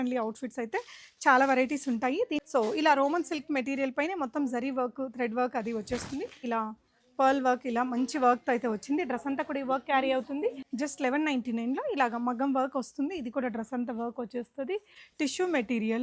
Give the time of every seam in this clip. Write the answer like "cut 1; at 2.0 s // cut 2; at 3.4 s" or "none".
cut 1; at 2.4 s // cut 2; at 6.4 s // cut 3; at 10.6 s // cut 4; at 15.0 s

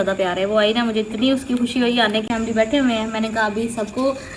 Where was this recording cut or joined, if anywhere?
cut 1; at 2.3 s

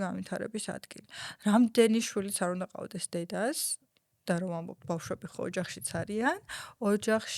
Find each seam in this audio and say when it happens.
none

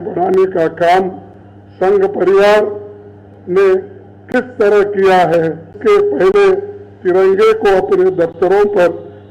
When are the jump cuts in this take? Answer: cut 1; at 5.7 s

